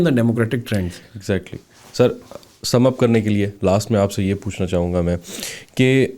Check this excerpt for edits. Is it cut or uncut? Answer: uncut